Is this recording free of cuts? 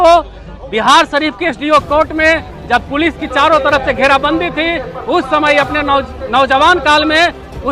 yes; 0 cuts

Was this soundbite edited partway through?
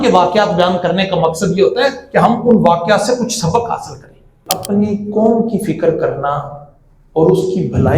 yes; 1 cut; at 4.5 s

